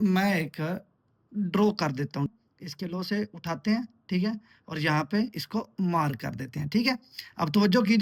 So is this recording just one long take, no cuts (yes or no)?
no